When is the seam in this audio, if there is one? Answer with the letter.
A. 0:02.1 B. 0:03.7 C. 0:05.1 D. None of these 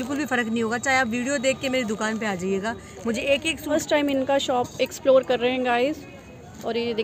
B